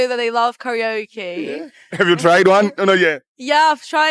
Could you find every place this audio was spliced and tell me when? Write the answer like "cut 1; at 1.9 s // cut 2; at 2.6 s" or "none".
none